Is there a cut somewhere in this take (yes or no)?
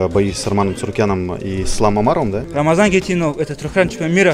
yes